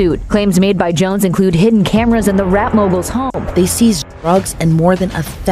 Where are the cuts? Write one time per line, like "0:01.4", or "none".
0:03.4